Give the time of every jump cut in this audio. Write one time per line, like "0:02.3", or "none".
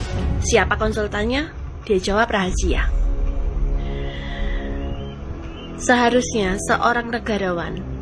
none